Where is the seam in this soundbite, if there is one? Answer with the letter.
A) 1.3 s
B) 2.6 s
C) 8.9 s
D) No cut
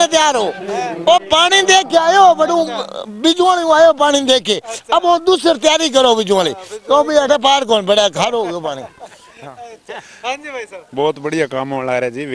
D